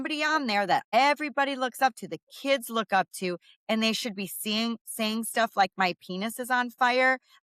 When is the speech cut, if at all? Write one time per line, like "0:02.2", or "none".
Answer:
0:00.9